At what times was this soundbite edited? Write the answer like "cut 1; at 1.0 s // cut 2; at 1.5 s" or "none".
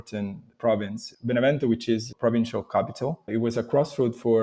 cut 1; at 2.1 s // cut 2; at 3.2 s